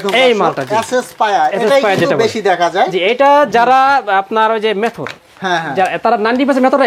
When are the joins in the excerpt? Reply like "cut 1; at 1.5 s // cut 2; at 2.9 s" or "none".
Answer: none